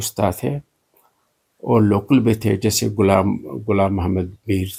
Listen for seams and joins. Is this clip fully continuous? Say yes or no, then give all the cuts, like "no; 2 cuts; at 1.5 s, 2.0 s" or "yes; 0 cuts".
yes; 0 cuts